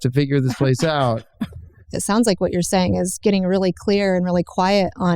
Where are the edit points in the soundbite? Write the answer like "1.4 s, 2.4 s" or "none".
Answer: 1.9 s